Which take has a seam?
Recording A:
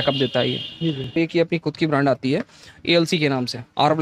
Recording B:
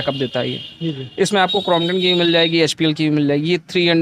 A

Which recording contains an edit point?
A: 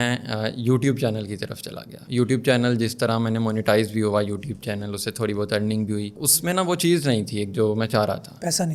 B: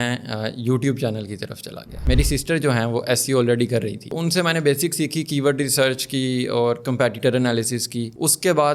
B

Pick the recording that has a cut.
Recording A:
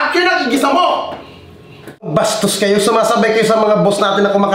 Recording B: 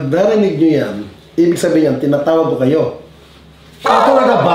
A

